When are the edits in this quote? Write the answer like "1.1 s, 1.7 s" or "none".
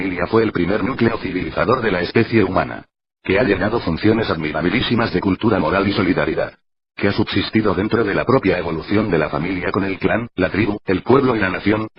1.9 s